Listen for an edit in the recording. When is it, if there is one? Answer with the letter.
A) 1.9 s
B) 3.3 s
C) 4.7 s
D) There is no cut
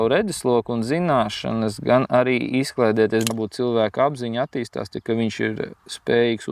B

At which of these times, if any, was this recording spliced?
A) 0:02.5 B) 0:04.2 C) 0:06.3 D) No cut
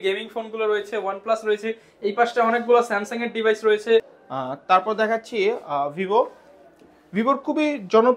B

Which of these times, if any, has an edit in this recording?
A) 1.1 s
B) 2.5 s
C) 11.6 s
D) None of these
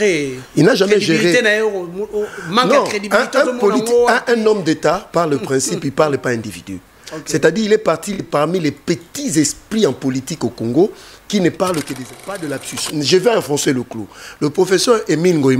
C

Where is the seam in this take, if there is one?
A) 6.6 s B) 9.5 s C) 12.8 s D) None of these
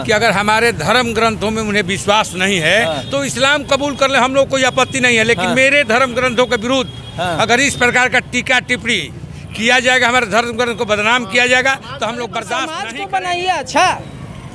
C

